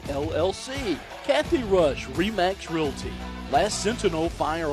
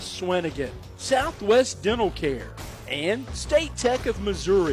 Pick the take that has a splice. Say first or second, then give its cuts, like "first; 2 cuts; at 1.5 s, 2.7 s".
first; 1 cut; at 1.1 s